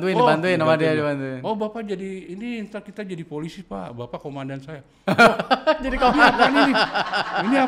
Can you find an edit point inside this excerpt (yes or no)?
no